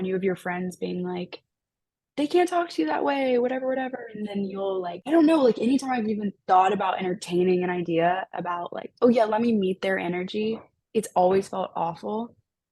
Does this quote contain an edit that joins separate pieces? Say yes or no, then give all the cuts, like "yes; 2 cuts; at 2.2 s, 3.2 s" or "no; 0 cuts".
yes; 1 cut; at 5.0 s